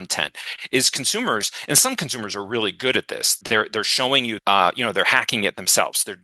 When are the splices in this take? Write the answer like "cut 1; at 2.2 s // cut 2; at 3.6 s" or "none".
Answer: cut 1; at 3.4 s // cut 2; at 4.4 s

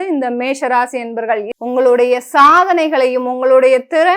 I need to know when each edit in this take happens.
cut 1; at 1.5 s

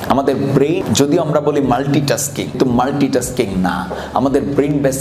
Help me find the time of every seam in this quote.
cut 1; at 0.8 s // cut 2; at 2.6 s

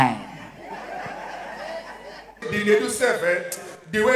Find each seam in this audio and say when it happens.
cut 1; at 2.5 s

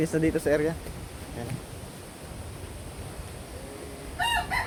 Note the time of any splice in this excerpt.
none

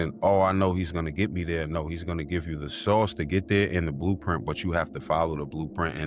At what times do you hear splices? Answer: none

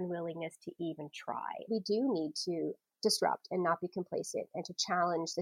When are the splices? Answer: cut 1; at 1.7 s // cut 2; at 2.8 s

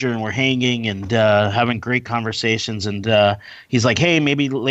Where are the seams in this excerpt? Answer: none

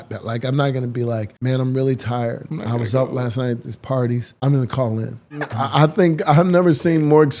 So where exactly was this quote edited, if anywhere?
cut 1; at 1.3 s // cut 2; at 2.5 s // cut 3; at 4.3 s // cut 4; at 5.6 s

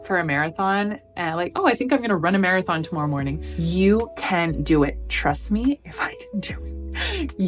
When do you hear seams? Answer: cut 1; at 3.5 s

